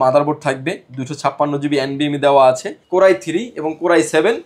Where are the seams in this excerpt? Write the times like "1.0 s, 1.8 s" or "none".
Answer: 2.7 s